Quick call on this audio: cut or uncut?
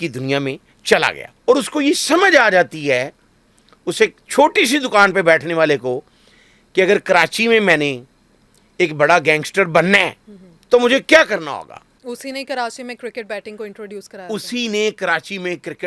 cut